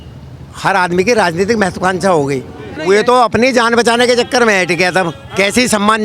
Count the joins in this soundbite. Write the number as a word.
one